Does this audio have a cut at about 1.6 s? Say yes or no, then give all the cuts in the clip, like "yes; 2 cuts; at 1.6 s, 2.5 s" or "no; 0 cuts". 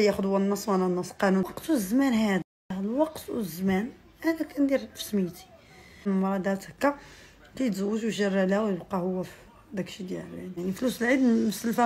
yes; 3 cuts; at 1.6 s, 6.1 s, 10.6 s